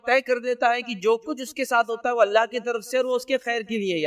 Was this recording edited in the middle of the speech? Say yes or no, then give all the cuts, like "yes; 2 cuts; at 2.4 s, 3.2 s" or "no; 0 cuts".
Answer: no; 0 cuts